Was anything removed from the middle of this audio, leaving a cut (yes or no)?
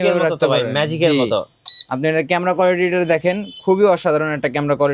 no